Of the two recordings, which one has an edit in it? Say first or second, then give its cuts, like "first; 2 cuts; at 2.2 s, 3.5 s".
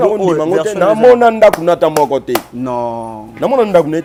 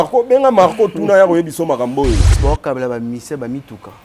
second; 1 cut; at 2.3 s